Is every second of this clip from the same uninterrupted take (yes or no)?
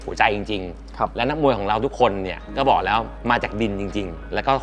yes